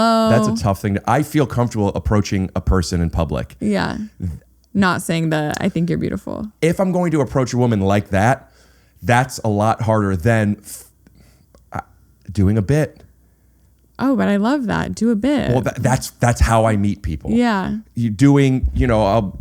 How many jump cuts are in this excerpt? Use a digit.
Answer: 1